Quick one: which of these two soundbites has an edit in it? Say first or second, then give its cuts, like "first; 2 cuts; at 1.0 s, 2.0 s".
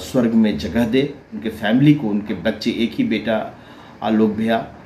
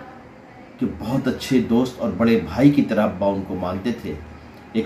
first; 1 cut; at 1.5 s